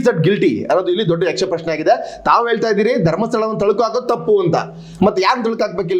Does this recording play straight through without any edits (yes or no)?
yes